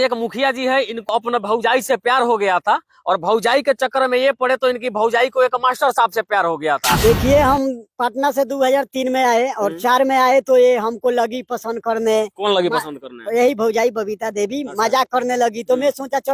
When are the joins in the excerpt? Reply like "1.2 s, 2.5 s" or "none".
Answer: 1.1 s, 7.0 s